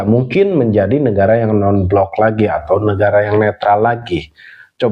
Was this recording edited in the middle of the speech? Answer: no; 0 cuts

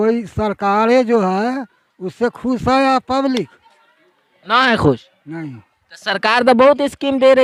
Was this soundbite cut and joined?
no; 0 cuts

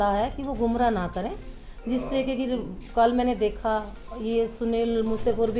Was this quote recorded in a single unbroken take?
yes; 0 cuts

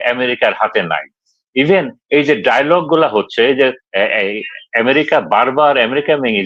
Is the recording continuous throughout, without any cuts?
yes; 0 cuts

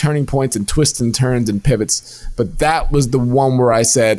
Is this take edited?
no; 0 cuts

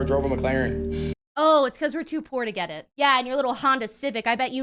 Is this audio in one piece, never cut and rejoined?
no; 1 cut; at 2.9 s

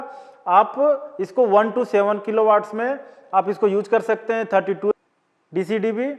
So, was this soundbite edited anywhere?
yes; 1 cut; at 4.9 s

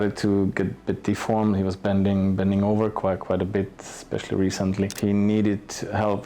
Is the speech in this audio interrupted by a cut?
yes; 1 cut; at 4.9 s

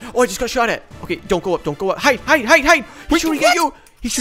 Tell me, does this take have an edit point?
no; 0 cuts

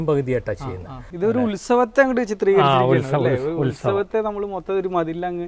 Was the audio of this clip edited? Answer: yes; 1 cut; at 1.0 s

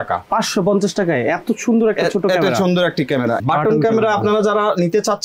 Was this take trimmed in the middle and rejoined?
yes; 1 cut; at 3.4 s

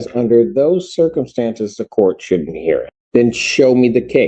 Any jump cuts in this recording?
yes; 1 cut; at 2.9 s

